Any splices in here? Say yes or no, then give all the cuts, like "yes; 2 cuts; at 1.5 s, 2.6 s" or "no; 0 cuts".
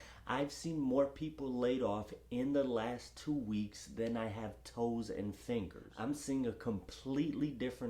yes; 1 cut; at 5.8 s